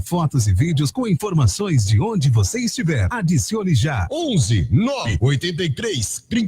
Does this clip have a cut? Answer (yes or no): yes